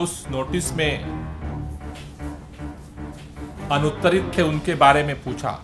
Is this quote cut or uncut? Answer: cut